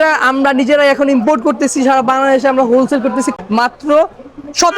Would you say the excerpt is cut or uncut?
cut